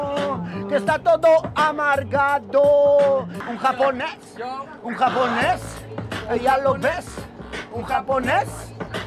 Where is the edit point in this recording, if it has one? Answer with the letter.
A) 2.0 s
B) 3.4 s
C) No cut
B